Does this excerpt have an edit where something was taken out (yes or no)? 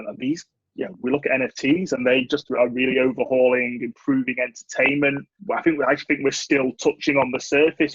yes